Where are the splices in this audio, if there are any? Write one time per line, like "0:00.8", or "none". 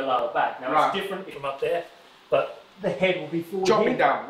0:01.3